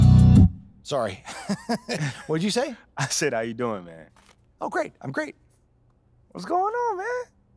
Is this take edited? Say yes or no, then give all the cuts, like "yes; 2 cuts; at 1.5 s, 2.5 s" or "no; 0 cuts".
no; 0 cuts